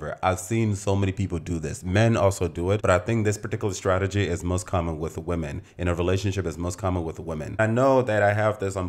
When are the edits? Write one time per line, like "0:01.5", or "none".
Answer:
0:07.6